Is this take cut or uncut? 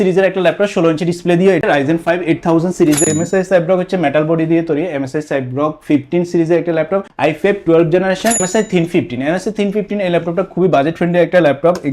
cut